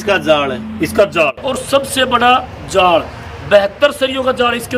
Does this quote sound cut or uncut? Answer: cut